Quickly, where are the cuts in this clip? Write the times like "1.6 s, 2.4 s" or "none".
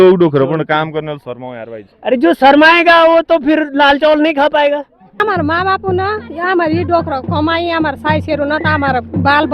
5.1 s